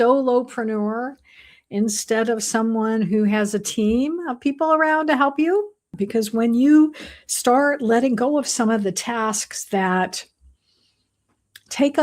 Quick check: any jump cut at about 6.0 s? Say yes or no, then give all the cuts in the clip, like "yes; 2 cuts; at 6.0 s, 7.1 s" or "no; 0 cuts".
yes; 1 cut; at 6.0 s